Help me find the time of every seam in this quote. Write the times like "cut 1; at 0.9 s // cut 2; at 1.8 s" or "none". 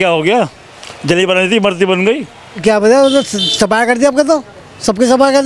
cut 1; at 2.6 s